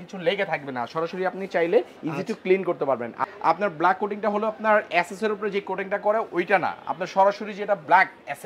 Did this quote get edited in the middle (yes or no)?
yes